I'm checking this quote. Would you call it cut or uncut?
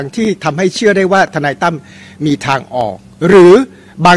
uncut